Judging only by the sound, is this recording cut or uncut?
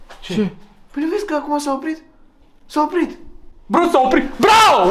uncut